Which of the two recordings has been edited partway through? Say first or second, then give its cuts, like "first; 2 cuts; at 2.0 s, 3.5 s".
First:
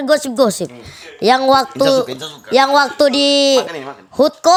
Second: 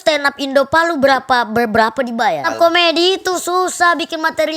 second; 1 cut; at 2.5 s